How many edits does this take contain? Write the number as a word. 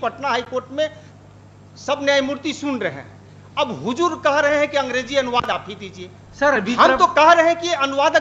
zero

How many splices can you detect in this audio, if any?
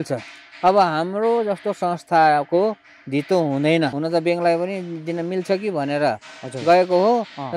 one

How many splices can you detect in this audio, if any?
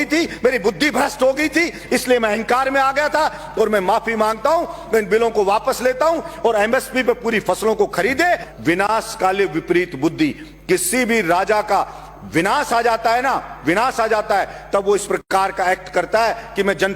one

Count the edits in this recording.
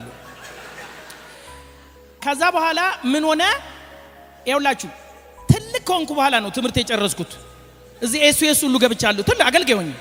zero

